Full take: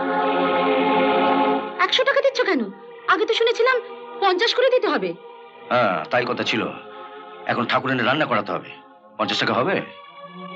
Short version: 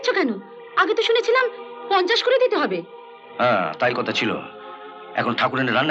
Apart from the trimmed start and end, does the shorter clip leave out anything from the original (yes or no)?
no